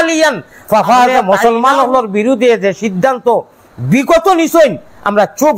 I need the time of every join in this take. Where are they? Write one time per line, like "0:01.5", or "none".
0:01.2